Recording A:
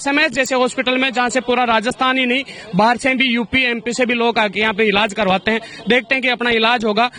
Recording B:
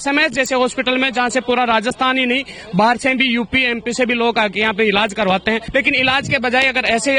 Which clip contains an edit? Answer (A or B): B